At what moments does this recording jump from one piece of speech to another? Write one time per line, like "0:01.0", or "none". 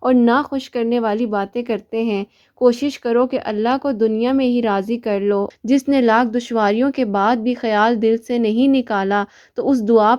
0:05.5